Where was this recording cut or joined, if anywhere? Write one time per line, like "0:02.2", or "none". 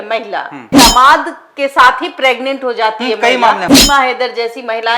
0:00.7
0:03.7